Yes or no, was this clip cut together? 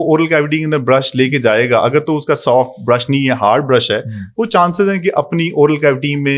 no